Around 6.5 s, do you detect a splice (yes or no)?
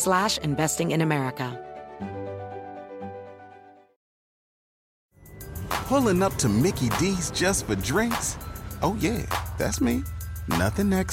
no